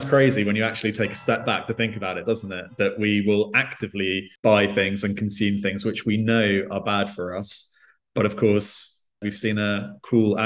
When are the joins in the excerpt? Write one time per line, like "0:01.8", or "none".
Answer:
none